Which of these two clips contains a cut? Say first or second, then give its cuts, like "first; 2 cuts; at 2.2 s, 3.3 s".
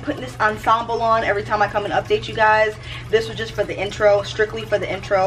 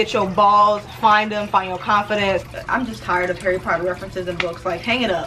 second; 1 cut; at 2.5 s